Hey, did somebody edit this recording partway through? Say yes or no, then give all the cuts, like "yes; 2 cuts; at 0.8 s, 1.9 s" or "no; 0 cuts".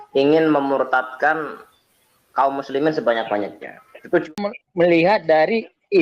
yes; 1 cut; at 4.3 s